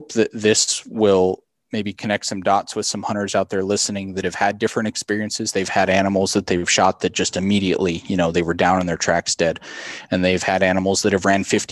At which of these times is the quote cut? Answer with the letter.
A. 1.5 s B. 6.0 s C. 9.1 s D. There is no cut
A